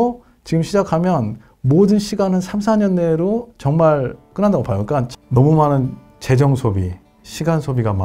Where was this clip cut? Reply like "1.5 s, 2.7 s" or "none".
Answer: 4.2 s, 5.1 s